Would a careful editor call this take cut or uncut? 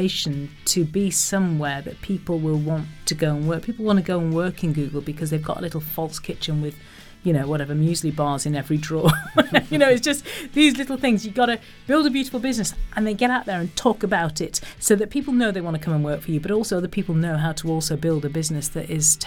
uncut